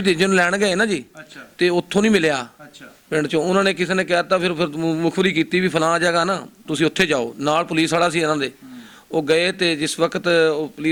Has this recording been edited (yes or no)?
no